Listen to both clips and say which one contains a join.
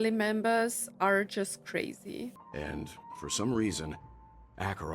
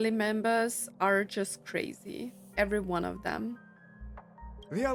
first; 1 cut; at 2.4 s

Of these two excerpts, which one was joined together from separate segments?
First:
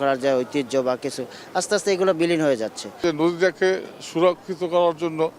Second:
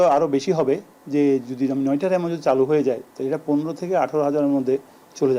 first; 1 cut; at 3.0 s

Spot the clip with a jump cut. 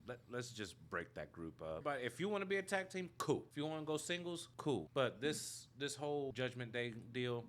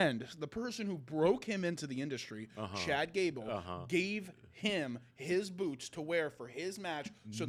first; 4 cuts; at 1.8 s, 3.5 s, 4.7 s, 6.3 s

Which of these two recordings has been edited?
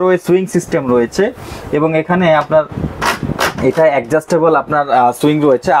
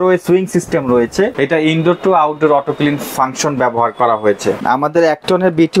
second; 2 cuts; at 1.3 s, 4.6 s

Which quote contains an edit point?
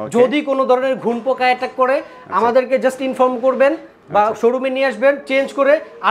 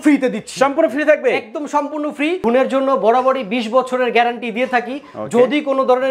second; 1 cut; at 2.4 s

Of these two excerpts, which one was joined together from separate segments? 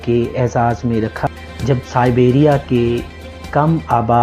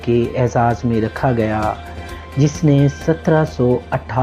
first; 1 cut; at 1.3 s

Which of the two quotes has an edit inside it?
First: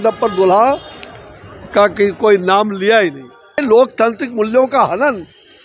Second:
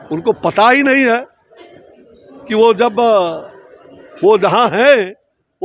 first; 1 cut; at 3.6 s

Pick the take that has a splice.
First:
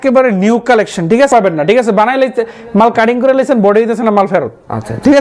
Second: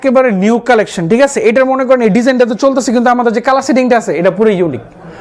first; 1 cut; at 1.3 s

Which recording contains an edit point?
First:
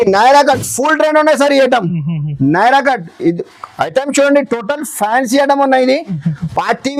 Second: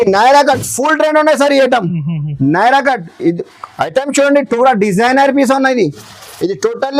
second; 1 cut; at 4.6 s

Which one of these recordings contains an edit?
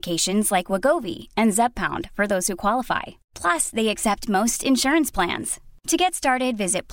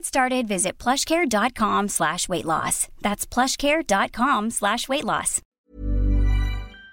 second; 1 cut; at 5.5 s

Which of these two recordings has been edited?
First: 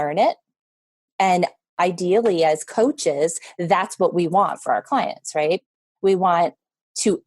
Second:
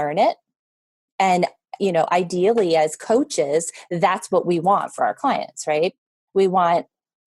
first; 1 cut; at 1.8 s

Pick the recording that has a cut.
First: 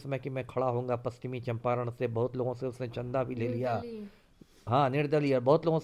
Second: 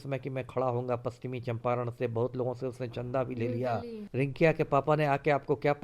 second; 1 cut; at 4.0 s

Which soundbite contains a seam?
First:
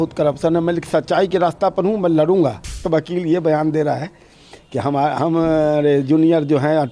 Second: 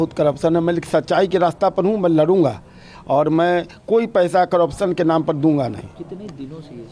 first; 1 cut; at 2.8 s

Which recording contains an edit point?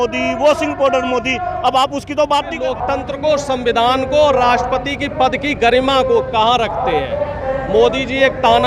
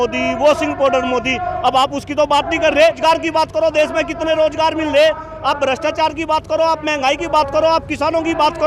first; 1 cut; at 2.5 s

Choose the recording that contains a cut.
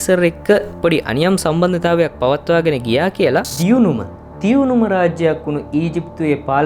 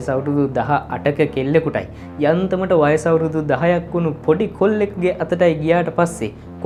first; 1 cut; at 3.5 s

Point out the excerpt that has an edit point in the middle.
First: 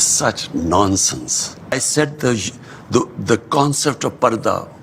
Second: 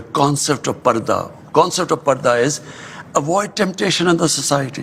first; 1 cut; at 1.7 s

